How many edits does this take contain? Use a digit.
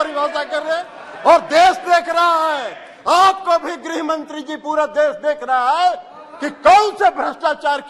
0